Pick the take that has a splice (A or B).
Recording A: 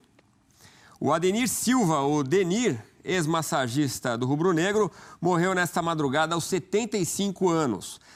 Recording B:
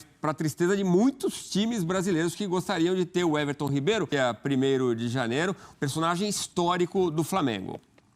B